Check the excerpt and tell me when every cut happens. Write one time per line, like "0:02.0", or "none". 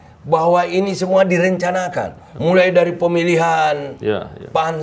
none